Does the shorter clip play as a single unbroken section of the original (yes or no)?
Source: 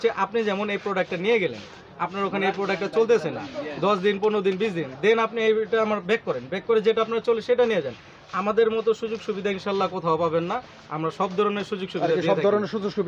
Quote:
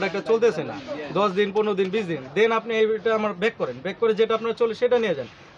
yes